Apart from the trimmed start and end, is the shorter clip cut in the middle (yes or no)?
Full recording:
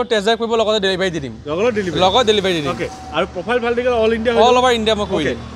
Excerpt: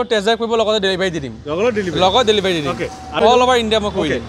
yes